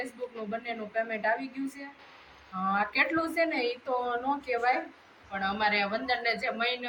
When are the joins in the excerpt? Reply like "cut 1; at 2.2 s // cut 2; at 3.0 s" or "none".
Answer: none